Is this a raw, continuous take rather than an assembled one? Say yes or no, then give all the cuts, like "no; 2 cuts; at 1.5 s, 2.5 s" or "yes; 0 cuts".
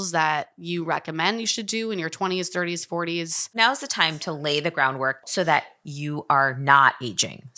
no; 2 cuts; at 3.5 s, 5.2 s